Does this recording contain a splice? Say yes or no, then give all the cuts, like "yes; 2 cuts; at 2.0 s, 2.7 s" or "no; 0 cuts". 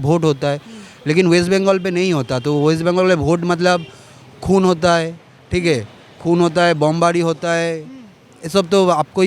no; 0 cuts